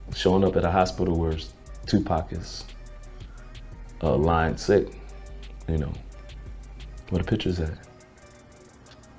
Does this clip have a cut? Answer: no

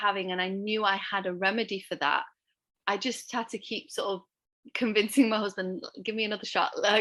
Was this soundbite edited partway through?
no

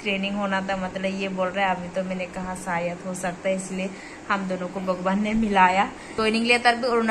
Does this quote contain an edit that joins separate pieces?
yes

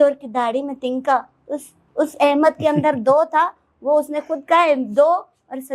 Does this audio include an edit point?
no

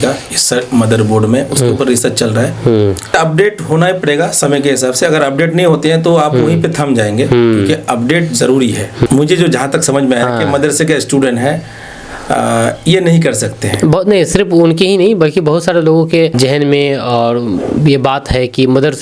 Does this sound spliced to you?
yes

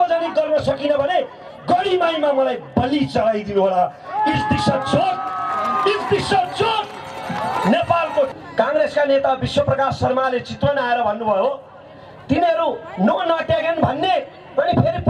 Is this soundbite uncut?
no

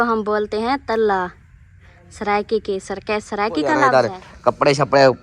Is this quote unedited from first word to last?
no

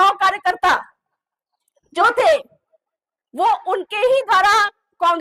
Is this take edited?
no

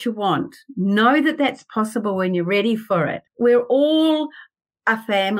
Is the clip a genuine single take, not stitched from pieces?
no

